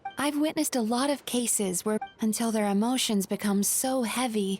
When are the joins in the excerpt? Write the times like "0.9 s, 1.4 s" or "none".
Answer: 2.1 s